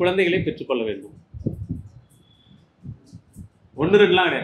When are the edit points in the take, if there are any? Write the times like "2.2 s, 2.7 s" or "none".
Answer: none

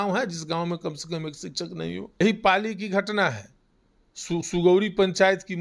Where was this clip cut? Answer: 2.1 s

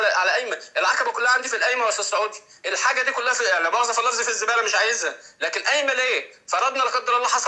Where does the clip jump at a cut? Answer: none

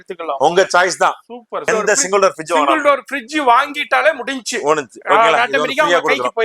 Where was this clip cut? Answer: 1.6 s

